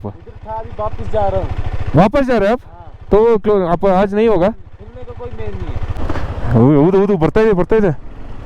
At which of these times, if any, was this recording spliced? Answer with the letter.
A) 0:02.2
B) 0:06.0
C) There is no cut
B